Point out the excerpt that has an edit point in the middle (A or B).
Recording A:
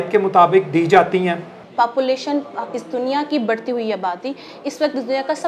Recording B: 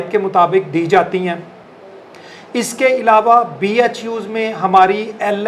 A